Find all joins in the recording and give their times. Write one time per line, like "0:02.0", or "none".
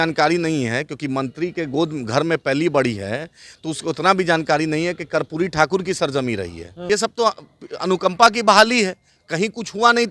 0:06.9